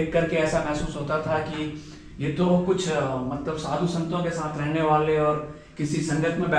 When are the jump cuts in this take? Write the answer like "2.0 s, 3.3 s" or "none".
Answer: none